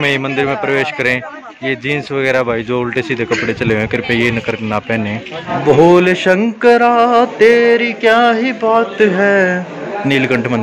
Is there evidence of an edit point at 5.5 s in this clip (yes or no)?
yes